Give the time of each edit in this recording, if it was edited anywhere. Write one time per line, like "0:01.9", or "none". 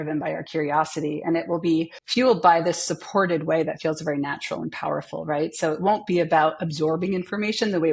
0:02.0